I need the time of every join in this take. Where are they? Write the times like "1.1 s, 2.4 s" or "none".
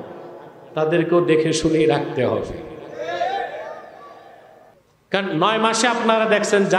4.7 s